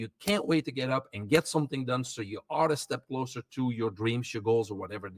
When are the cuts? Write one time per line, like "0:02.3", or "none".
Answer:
none